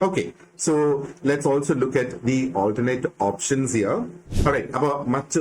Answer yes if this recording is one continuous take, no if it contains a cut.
no